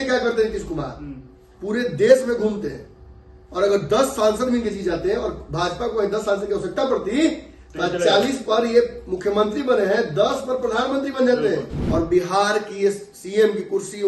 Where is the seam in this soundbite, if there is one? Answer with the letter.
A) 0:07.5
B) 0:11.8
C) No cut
B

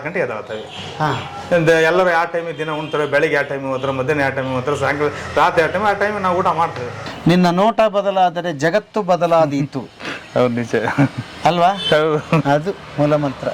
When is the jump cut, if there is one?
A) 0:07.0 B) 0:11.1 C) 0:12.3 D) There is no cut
A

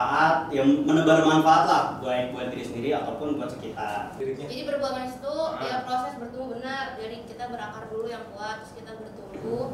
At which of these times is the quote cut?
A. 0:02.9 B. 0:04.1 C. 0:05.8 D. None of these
B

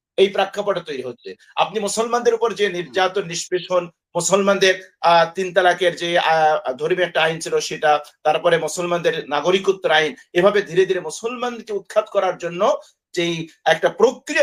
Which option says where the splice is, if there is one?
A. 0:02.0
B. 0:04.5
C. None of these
C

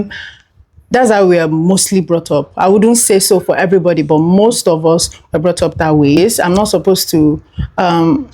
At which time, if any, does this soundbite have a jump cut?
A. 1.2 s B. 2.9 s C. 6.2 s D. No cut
C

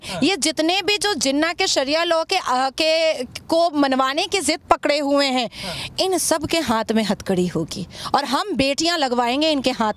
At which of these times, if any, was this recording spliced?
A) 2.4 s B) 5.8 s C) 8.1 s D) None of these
D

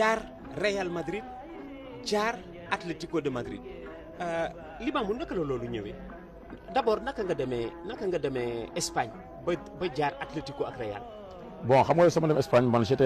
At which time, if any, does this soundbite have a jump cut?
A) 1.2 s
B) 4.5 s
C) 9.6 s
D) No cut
B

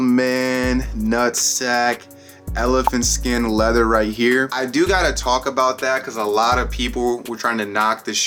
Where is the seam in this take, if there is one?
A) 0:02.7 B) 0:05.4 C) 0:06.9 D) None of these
D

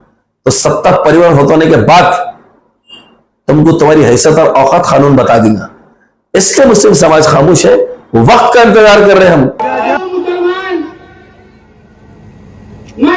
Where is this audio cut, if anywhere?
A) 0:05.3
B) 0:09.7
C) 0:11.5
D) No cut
B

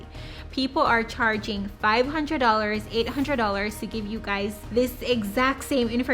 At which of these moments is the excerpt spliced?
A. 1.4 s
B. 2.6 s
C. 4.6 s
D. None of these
C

